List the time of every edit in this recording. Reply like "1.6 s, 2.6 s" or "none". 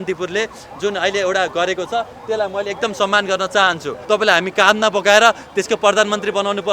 4.0 s